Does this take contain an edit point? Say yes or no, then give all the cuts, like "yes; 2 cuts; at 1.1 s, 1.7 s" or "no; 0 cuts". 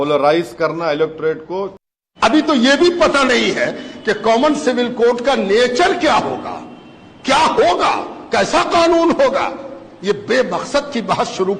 yes; 1 cut; at 1.7 s